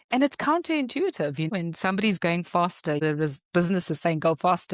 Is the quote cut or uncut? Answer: cut